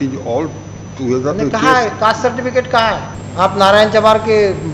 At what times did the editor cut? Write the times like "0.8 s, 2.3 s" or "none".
3.2 s